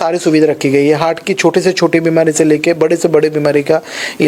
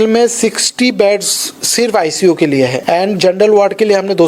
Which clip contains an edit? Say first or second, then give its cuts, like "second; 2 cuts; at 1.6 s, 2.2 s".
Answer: second; 1 cut; at 2.8 s